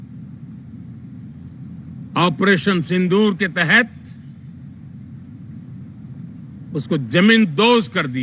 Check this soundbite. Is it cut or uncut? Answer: uncut